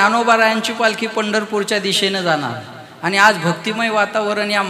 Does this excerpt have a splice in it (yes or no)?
no